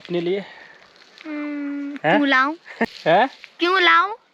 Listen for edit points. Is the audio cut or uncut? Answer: cut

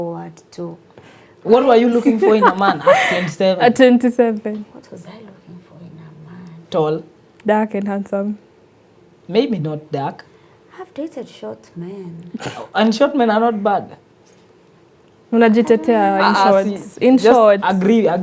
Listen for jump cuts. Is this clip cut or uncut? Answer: uncut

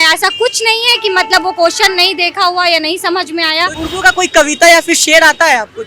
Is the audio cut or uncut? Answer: cut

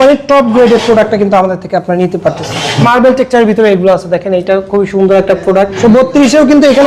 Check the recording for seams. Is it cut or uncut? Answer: cut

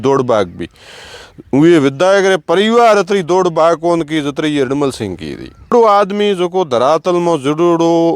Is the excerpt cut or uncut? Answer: cut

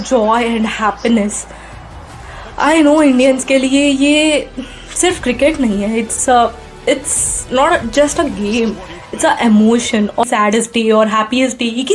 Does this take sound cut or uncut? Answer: cut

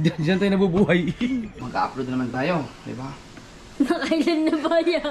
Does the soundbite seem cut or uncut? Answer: cut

